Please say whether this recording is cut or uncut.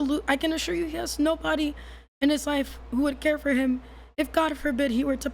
uncut